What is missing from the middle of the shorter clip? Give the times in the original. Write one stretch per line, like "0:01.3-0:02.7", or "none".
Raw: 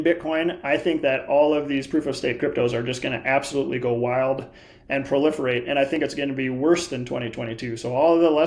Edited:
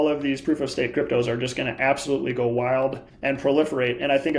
0:04.5-0:04.8